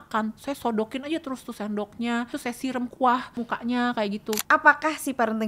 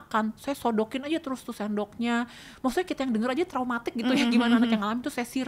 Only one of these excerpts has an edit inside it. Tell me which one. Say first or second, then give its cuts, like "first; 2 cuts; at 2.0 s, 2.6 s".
first; 3 cuts; at 2.4 s, 3.4 s, 4.4 s